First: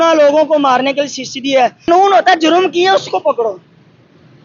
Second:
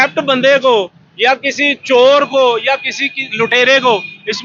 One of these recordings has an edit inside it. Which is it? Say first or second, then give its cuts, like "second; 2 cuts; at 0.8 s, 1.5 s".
first; 1 cut; at 1.9 s